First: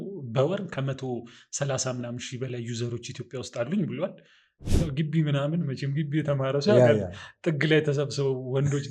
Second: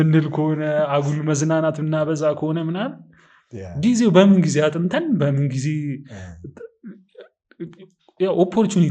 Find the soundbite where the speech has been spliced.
first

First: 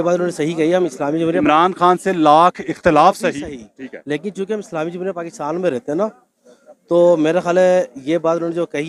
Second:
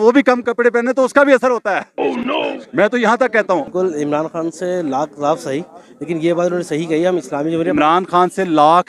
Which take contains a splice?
second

